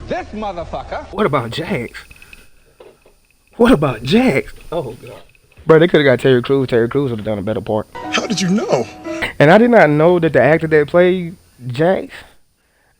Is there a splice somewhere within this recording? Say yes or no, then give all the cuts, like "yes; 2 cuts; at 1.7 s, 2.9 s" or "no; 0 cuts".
yes; 1 cut; at 1.0 s